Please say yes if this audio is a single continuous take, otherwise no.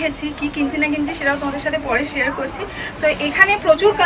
yes